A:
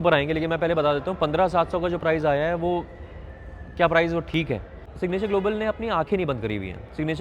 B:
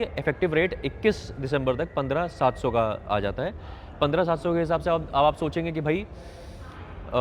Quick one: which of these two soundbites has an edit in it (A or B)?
A